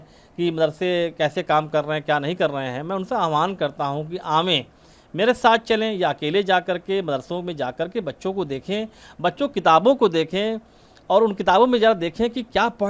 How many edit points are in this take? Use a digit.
0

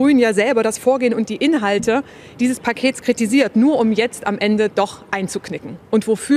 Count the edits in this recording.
0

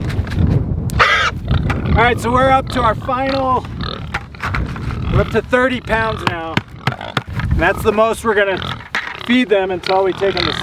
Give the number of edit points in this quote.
2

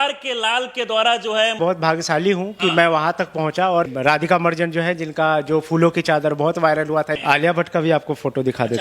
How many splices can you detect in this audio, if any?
3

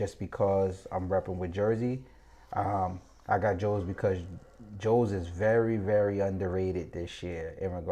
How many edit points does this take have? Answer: 0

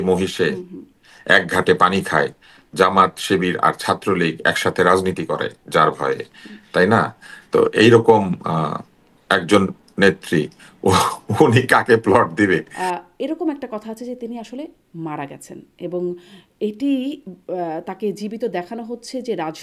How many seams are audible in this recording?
1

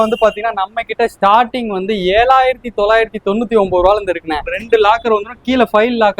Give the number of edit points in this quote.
1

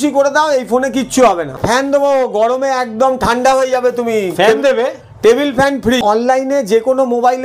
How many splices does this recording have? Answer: 2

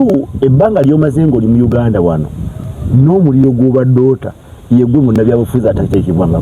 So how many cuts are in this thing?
0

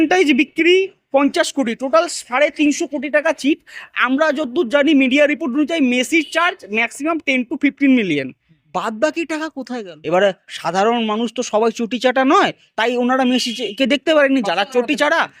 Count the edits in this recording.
1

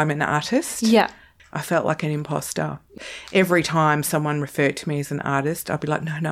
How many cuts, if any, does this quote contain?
2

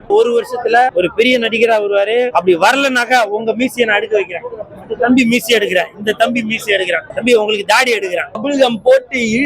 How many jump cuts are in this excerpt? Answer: 4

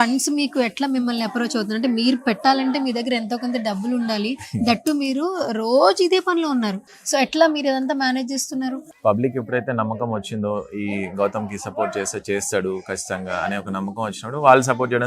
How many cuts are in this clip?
2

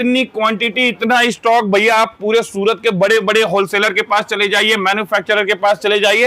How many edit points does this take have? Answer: 0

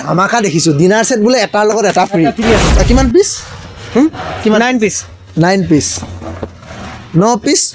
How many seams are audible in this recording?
1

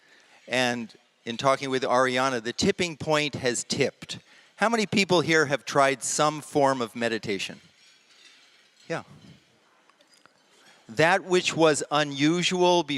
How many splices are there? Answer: 1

